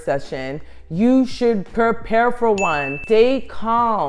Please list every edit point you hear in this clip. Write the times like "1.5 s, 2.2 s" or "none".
3.0 s